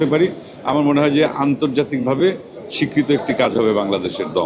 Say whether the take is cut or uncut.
uncut